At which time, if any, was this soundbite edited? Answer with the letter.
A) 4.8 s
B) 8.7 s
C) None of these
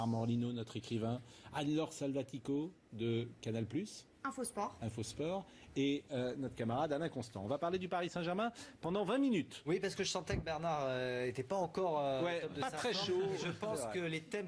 C